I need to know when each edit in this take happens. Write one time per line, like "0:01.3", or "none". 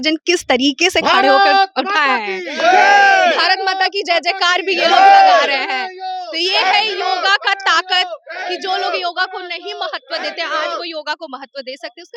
none